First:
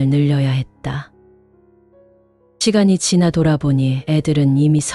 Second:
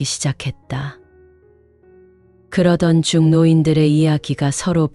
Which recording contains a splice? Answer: first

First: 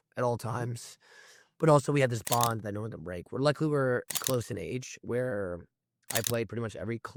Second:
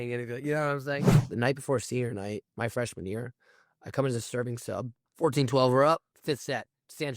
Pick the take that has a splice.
second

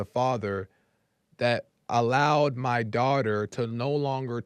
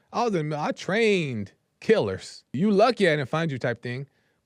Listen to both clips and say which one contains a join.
second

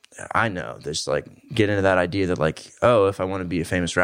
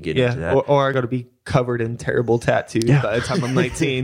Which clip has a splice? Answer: second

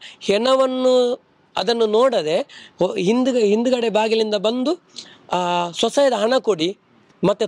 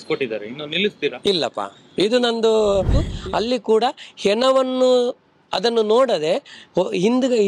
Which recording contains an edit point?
second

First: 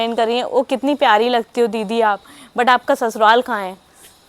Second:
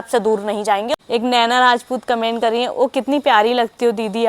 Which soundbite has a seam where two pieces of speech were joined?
second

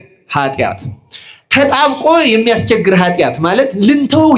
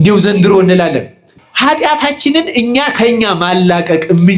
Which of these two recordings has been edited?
second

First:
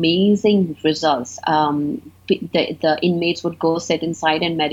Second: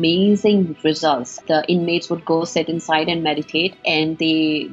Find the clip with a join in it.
second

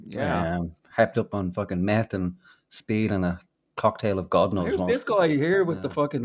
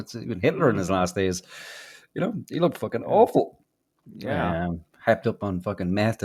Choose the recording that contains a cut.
first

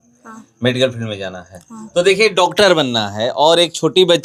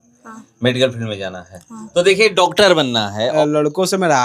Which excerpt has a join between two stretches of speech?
second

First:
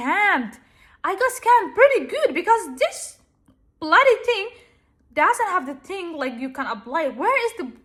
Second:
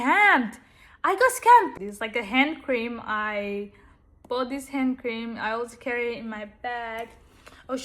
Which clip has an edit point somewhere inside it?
second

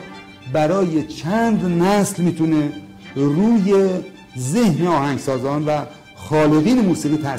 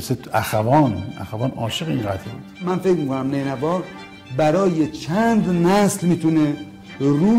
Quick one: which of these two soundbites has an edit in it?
second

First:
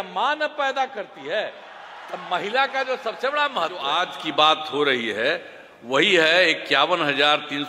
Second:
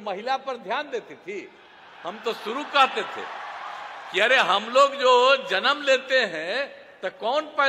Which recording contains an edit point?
first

